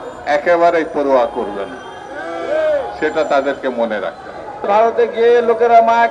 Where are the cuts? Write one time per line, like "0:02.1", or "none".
0:04.7